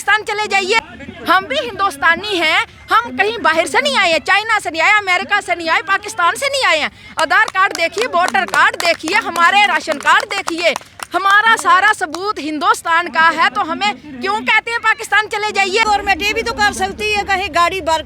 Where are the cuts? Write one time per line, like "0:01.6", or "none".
0:00.8
0:15.8